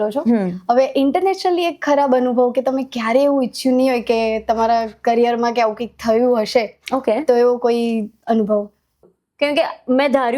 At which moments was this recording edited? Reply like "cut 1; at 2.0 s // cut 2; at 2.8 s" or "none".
cut 1; at 9.0 s